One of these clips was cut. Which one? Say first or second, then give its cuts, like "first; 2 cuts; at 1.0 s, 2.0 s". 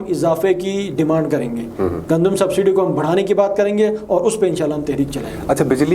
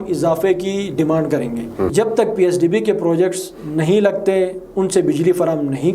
second; 1 cut; at 1.9 s